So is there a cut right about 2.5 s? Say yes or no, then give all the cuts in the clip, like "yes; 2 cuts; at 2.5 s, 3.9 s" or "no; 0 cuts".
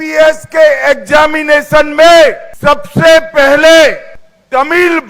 yes; 1 cut; at 2.5 s